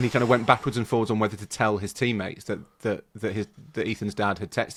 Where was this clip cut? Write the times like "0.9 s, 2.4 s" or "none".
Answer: none